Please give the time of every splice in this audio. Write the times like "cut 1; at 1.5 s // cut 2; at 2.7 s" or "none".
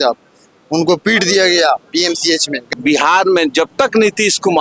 cut 1; at 2.6 s